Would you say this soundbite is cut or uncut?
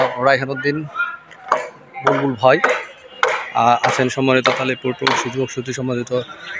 uncut